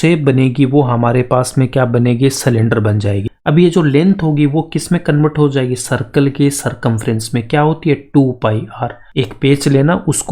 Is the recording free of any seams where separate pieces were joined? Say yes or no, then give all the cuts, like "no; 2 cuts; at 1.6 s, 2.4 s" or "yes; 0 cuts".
no; 2 cuts; at 3.3 s, 9.0 s